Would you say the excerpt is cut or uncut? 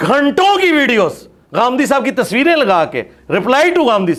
uncut